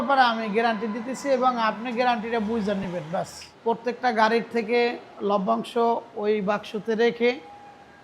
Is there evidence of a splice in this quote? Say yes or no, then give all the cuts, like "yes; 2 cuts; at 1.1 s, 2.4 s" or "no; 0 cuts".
yes; 1 cut; at 3.4 s